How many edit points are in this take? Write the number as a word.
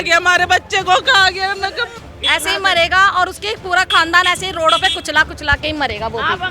one